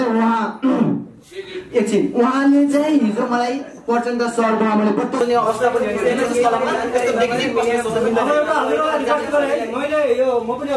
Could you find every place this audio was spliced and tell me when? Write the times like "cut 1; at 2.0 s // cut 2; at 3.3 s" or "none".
cut 1; at 5.2 s

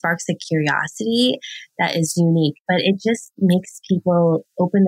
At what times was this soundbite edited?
cut 1; at 2.6 s

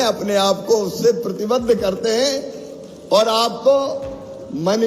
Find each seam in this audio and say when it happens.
none

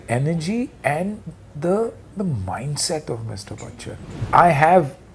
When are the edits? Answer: cut 1; at 4.1 s

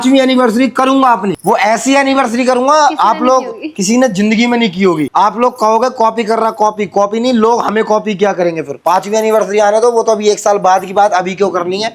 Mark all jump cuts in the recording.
none

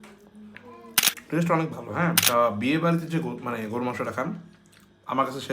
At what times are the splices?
cut 1; at 1.2 s // cut 2; at 2.2 s

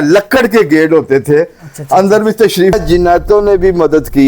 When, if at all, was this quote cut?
cut 1; at 2.7 s

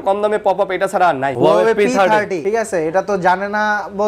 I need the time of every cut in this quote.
cut 1; at 1.3 s // cut 2; at 2.4 s

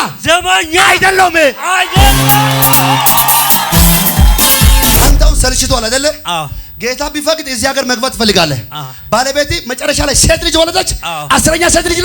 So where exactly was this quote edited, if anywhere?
cut 1; at 5.0 s

